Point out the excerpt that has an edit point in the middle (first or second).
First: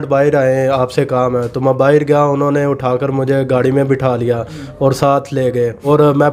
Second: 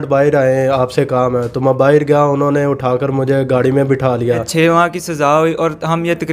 second